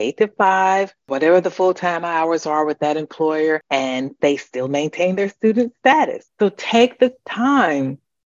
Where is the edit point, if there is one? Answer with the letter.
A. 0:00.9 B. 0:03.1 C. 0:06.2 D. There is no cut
C